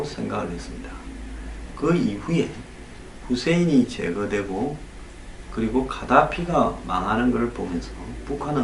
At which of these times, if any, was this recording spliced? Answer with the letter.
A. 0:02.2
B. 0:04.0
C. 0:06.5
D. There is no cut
C